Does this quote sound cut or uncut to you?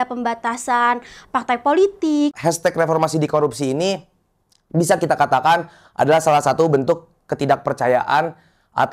cut